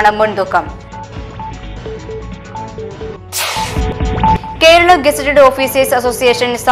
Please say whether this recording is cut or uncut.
uncut